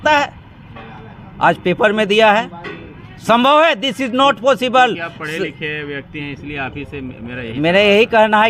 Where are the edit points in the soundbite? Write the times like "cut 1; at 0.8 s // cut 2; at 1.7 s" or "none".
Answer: none